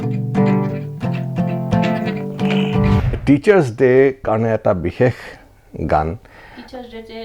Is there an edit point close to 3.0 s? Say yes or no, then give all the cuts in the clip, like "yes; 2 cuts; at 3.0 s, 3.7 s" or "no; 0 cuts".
yes; 1 cut; at 3.0 s